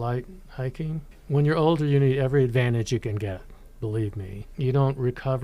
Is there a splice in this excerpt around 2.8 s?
no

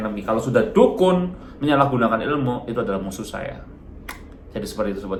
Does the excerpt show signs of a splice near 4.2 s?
no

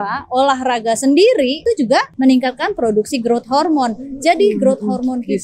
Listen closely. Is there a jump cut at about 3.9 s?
no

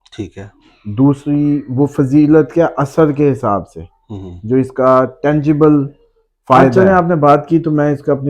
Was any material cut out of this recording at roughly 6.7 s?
yes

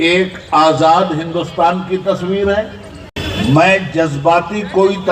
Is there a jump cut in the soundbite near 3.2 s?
yes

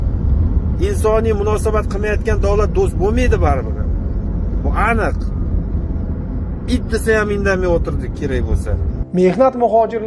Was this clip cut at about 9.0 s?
yes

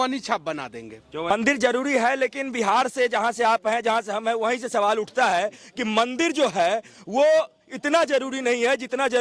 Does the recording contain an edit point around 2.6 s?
no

